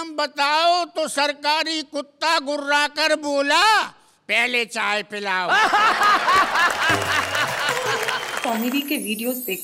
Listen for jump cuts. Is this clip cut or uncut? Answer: cut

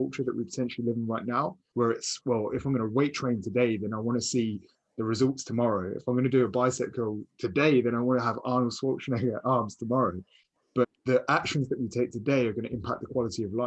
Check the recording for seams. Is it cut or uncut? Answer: cut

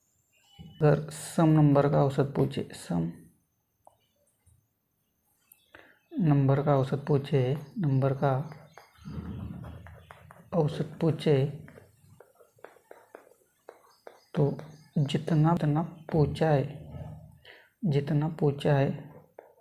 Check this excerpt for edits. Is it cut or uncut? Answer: cut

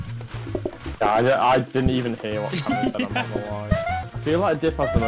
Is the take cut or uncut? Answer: cut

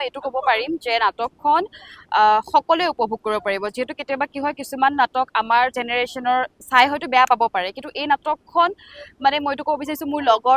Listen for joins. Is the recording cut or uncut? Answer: uncut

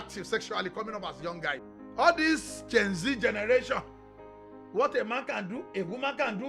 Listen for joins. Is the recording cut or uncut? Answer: cut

